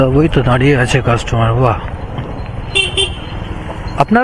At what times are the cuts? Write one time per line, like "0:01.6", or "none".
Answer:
none

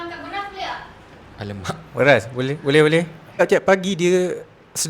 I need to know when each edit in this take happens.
0:03.4

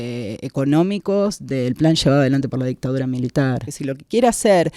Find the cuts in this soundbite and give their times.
0:03.7

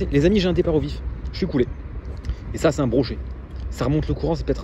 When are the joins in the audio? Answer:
none

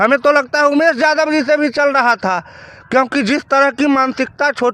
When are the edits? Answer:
none

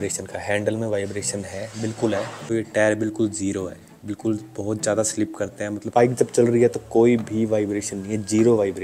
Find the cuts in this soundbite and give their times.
0:02.4
0:05.8

